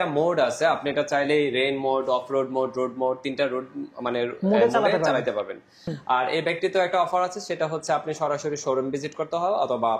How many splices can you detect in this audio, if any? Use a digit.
1